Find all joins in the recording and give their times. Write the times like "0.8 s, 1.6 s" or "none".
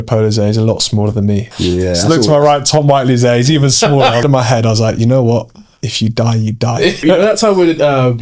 1.5 s, 4.2 s, 7.0 s